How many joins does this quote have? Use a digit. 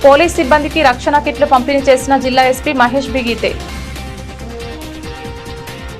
2